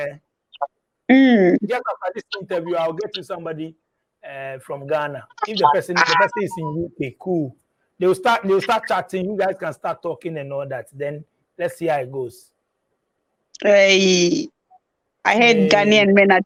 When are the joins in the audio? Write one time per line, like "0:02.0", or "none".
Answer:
none